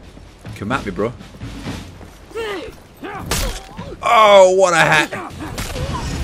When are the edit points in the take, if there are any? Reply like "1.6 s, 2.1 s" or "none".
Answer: 5.3 s